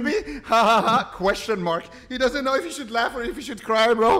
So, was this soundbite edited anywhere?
no; 0 cuts

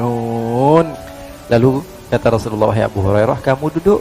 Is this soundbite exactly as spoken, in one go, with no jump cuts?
no; 1 cut; at 1.0 s

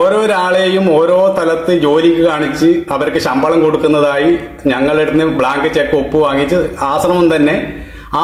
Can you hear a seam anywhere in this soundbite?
no; 0 cuts

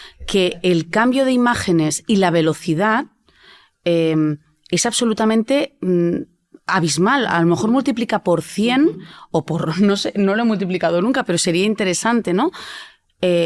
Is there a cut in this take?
no; 0 cuts

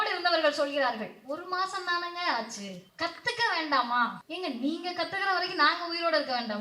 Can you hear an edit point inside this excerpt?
yes; 2 cuts; at 2.8 s, 4.2 s

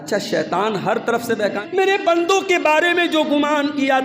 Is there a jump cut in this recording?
yes; 1 cut; at 1.6 s

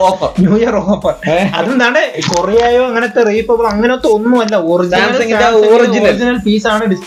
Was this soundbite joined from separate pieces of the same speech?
no; 0 cuts

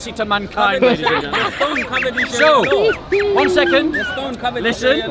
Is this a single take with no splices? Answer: yes; 0 cuts

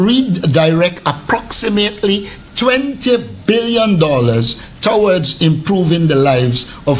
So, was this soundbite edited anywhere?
no; 0 cuts

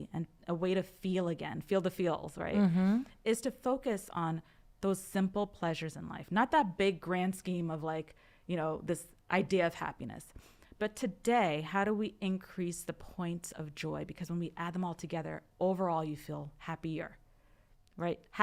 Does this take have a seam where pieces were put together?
no; 0 cuts

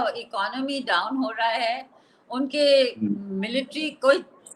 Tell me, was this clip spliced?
no; 0 cuts

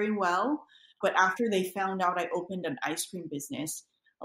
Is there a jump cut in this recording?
yes; 1 cut; at 0.9 s

